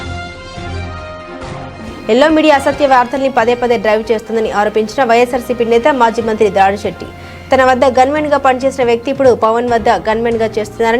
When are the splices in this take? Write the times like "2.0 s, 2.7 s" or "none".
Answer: none